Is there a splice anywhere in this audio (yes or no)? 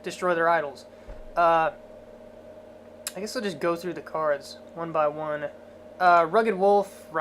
yes